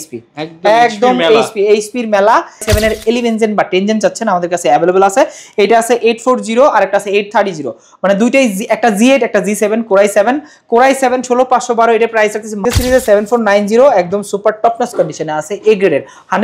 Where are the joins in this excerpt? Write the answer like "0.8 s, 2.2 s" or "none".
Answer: 2.7 s, 12.5 s